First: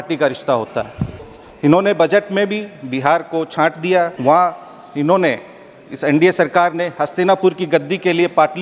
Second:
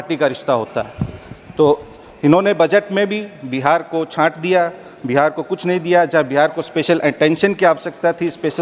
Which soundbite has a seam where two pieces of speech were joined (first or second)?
first